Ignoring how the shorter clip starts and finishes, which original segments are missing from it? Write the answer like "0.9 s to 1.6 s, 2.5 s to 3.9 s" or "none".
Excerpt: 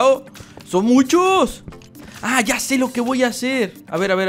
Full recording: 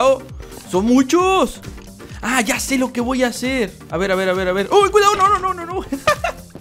none

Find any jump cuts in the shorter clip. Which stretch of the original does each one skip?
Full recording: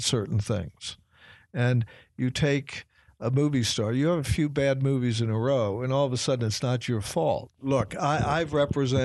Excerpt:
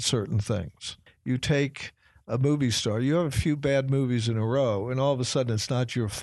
1.1 s to 2.0 s

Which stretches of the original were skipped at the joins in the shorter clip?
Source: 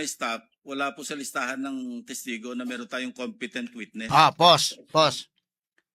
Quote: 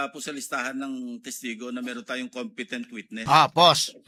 none

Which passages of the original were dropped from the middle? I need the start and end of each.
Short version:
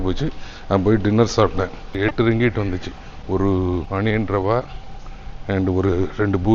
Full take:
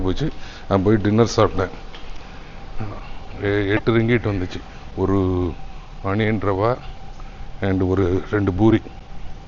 2.0 s to 3.6 s, 5.6 s to 6.0 s

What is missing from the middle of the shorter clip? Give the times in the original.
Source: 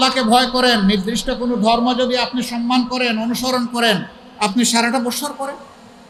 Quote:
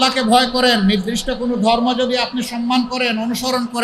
none

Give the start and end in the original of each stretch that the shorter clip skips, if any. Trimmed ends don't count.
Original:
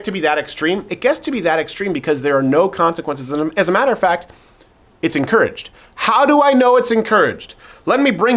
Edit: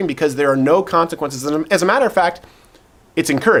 none

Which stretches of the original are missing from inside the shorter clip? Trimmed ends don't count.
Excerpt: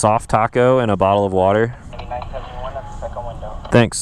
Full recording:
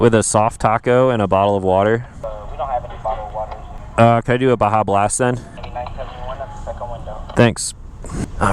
2.1 s to 5.5 s

